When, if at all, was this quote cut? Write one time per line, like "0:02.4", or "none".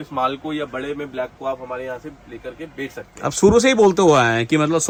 none